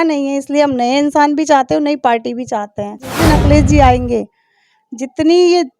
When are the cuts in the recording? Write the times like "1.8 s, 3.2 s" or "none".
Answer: 3.1 s